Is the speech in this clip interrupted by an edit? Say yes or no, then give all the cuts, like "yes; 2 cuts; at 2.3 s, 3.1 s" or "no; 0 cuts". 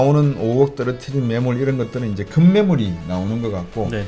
no; 0 cuts